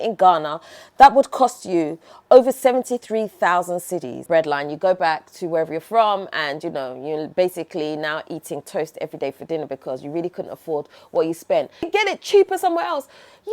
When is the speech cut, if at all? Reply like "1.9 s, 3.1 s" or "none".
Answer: 4.2 s, 11.9 s